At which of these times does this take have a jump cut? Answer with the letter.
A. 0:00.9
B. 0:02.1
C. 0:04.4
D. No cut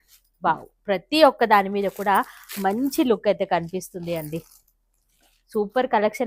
D